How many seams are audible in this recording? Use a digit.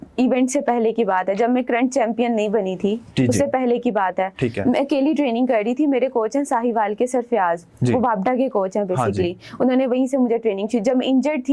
0